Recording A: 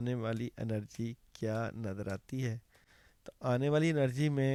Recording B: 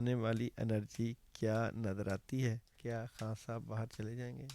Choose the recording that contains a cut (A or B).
B